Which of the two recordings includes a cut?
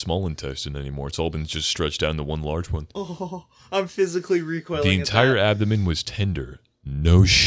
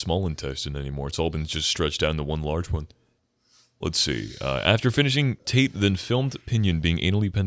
first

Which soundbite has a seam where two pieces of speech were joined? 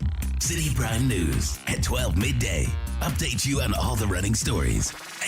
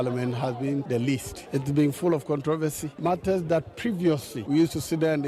second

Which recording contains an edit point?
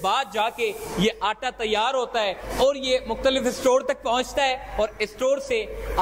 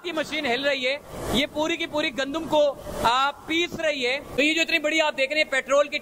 second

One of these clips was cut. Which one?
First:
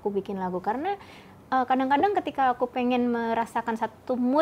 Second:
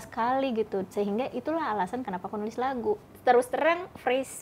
second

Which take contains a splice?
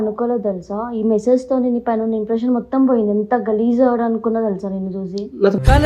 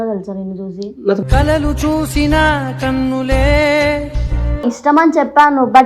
second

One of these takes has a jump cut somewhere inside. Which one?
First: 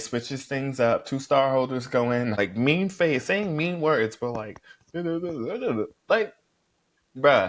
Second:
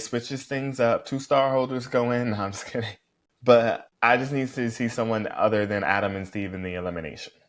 first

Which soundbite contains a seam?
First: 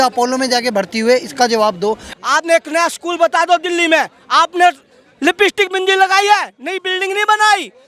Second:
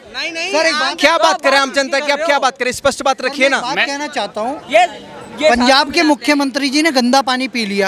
first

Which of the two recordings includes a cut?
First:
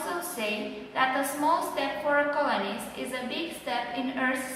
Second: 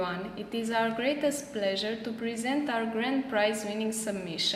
first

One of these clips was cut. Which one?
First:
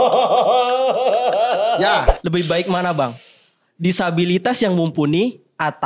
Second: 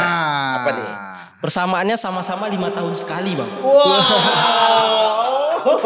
first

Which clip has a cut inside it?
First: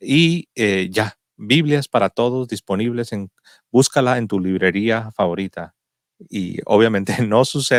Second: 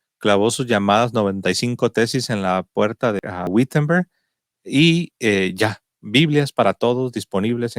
second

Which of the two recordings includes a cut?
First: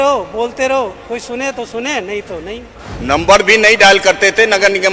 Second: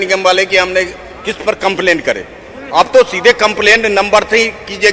first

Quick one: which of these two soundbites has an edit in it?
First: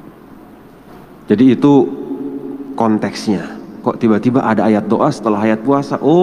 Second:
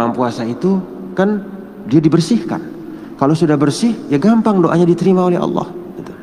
first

